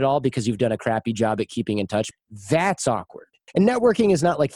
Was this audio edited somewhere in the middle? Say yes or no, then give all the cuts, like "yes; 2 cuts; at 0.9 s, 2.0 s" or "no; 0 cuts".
yes; 2 cuts; at 2.1 s, 3.3 s